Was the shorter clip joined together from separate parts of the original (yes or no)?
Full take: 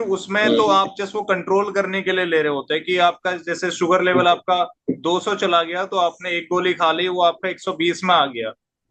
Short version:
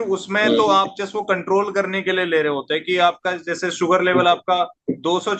no